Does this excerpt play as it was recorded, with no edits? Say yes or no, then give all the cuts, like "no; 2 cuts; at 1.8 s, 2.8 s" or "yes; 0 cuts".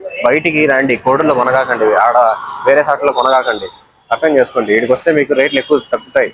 yes; 0 cuts